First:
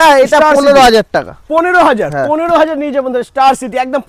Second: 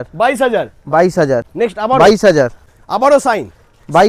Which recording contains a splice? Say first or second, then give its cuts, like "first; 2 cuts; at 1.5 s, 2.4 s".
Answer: second; 2 cuts; at 1.4 s, 2.6 s